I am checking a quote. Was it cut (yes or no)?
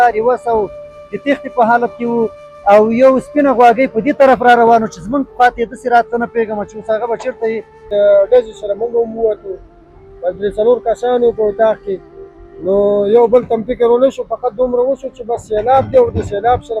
yes